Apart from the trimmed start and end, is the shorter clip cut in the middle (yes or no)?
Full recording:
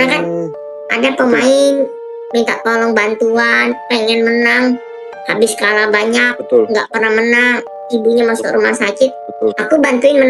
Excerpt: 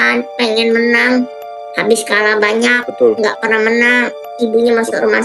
no